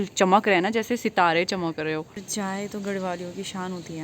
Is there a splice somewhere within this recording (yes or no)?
yes